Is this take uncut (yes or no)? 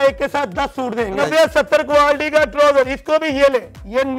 no